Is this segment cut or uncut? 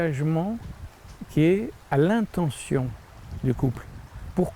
cut